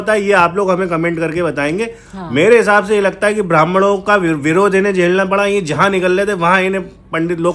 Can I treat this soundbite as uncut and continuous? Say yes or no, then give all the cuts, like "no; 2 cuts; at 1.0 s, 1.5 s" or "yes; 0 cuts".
yes; 0 cuts